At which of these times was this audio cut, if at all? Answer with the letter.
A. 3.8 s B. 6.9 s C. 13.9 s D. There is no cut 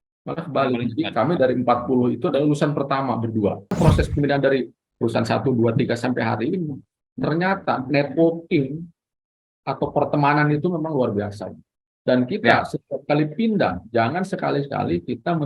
A